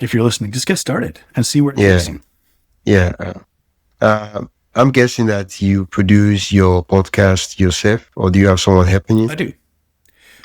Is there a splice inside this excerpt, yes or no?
no